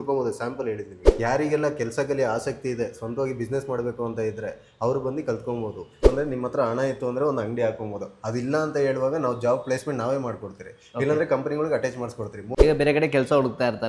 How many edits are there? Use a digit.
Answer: 3